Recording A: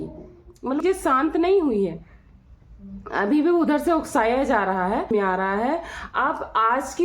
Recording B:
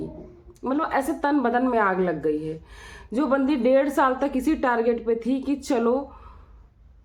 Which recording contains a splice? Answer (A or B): A